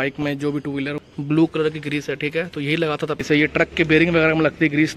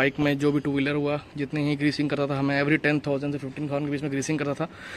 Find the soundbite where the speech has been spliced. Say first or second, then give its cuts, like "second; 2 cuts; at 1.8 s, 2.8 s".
first; 2 cuts; at 1.0 s, 3.2 s